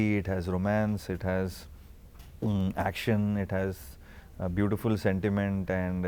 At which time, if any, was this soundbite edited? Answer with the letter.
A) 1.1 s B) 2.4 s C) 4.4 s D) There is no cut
D